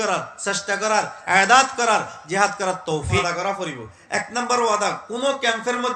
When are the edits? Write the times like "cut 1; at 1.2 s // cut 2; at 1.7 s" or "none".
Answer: cut 1; at 3.2 s